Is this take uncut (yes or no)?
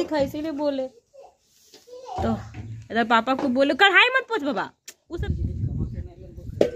no